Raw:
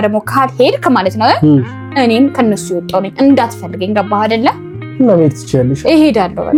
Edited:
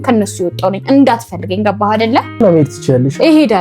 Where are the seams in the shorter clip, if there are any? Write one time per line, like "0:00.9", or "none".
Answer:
0:02.4